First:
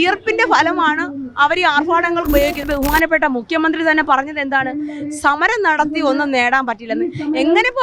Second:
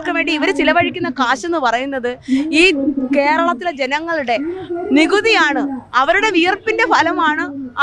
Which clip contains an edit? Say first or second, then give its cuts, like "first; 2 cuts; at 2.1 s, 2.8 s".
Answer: first; 1 cut; at 2.6 s